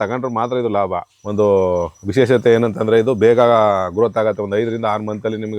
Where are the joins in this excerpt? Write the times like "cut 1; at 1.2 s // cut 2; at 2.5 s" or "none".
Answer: cut 1; at 1.2 s